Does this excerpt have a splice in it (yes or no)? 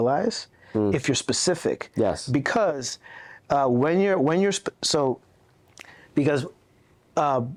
no